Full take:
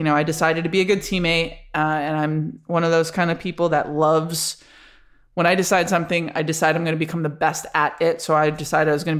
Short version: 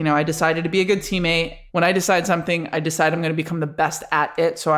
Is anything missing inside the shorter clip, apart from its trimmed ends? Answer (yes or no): yes